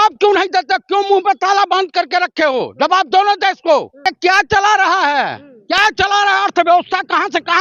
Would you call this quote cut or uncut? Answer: cut